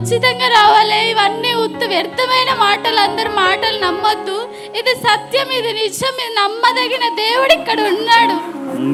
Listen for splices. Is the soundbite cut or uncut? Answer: uncut